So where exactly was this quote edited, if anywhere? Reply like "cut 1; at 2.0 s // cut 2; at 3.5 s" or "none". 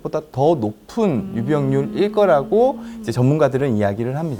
none